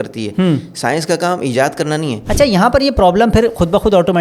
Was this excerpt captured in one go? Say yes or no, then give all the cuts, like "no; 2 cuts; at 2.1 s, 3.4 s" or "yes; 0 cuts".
no; 1 cut; at 2.2 s